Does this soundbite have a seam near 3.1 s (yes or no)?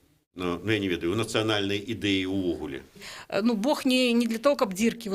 yes